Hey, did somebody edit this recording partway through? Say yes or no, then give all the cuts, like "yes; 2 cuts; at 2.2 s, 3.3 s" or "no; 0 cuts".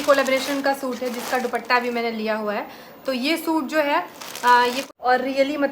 yes; 1 cut; at 4.8 s